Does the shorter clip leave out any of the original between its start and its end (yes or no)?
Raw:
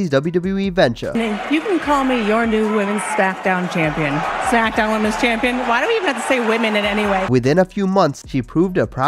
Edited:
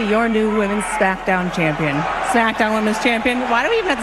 no